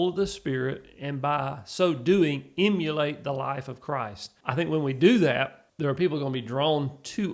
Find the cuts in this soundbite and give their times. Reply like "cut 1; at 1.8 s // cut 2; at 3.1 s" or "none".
cut 1; at 4.2 s // cut 2; at 5.6 s